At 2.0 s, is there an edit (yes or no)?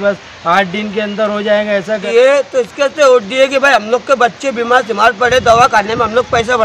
yes